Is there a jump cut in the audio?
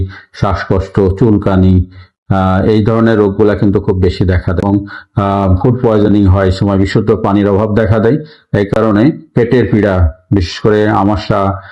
no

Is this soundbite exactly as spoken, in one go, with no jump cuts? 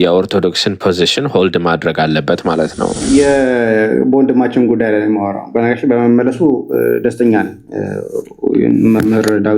no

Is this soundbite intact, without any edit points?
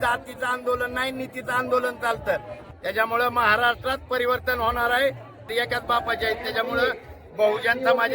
no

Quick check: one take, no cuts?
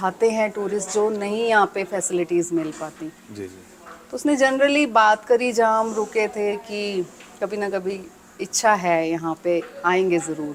yes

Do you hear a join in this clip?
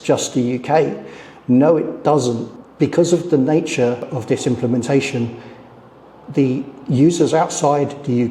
yes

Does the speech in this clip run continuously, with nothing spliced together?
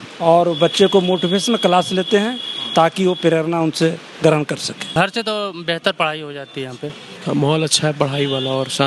no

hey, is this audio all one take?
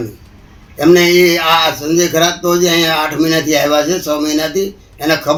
yes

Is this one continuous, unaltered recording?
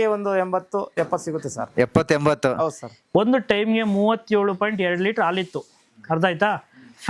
no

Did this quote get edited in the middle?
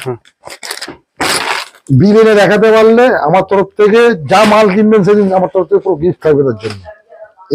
no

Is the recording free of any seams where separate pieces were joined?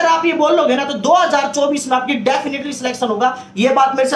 yes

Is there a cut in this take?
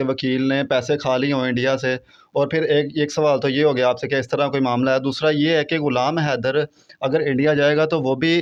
no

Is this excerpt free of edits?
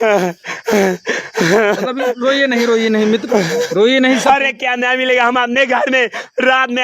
no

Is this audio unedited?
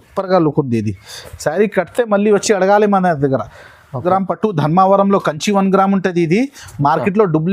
no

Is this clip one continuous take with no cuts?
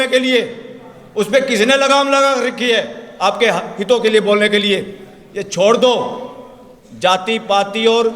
yes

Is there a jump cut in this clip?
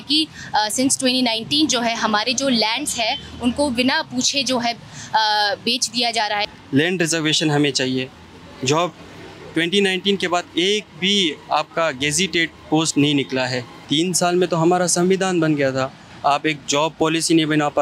yes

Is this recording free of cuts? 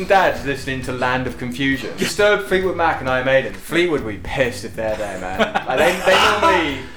no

